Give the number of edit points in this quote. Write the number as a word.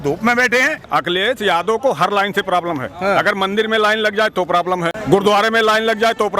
two